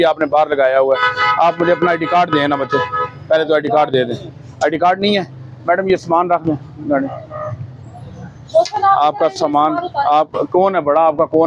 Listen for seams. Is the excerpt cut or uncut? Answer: uncut